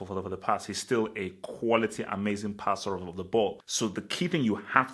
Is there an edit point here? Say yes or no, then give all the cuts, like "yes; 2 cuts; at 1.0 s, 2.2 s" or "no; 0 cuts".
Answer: yes; 1 cut; at 3.7 s